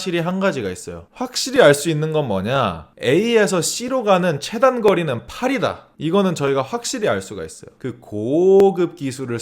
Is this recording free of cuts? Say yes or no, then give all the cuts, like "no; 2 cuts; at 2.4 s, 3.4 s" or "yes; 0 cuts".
no; 1 cut; at 7.6 s